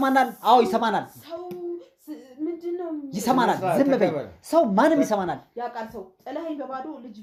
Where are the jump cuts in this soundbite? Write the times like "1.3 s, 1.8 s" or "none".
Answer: none